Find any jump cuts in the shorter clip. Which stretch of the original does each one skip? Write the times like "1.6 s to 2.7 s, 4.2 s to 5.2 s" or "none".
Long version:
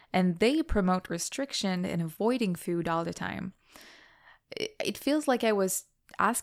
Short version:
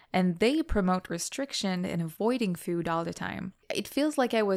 3.6 s to 4.7 s

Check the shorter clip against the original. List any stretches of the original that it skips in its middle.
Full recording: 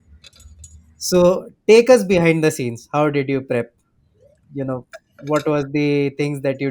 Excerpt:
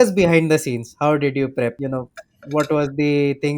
3.7 s to 4.5 s

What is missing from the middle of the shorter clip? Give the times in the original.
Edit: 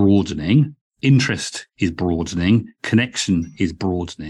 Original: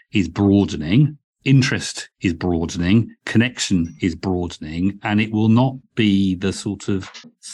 none

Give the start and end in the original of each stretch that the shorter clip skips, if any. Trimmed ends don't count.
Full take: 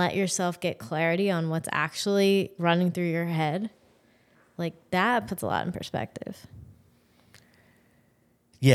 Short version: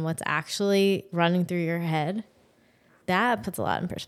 4.4 s to 4.8 s

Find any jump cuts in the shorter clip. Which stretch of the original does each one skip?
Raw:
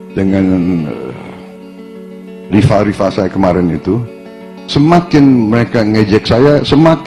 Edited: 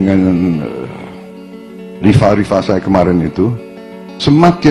2.0 s to 2.2 s

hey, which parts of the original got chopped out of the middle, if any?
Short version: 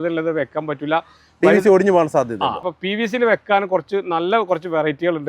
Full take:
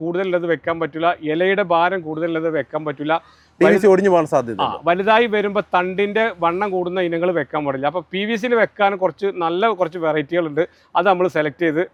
4.8 s to 7.9 s

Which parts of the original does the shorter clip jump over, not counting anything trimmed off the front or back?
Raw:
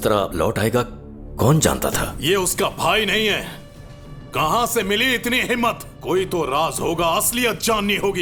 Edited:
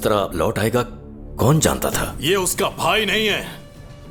none

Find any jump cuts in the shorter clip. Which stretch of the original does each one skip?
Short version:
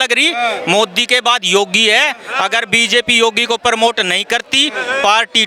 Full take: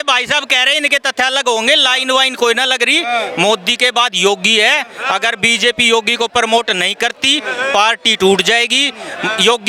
none

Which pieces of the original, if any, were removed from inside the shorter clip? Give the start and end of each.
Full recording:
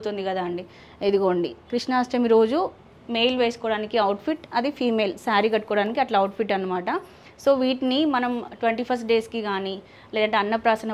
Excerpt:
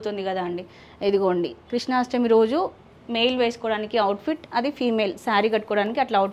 none

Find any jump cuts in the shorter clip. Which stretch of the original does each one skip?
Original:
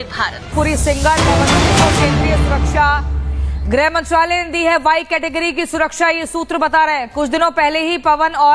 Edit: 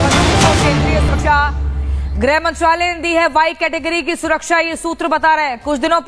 2.5 s to 2.6 s

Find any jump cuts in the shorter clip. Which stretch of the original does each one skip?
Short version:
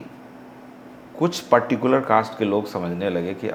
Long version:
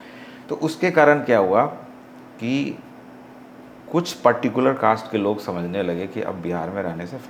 none

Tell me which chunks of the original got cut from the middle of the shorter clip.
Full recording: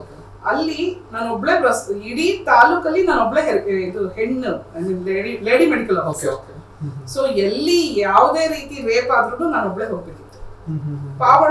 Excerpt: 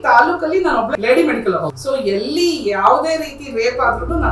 3.4 s to 5.4 s, 6.2 s to 7.0 s

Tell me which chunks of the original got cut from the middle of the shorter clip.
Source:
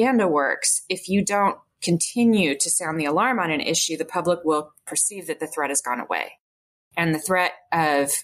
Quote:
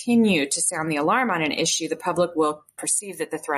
none

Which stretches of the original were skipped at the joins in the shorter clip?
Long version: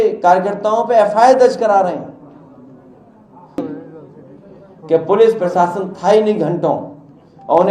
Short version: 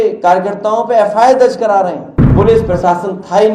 2.3 s to 5.0 s

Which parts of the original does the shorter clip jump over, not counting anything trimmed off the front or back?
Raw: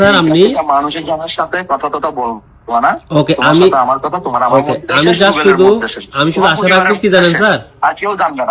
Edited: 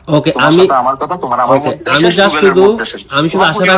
none

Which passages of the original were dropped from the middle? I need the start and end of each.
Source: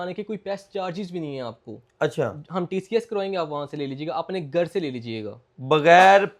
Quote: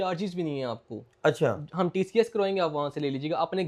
none

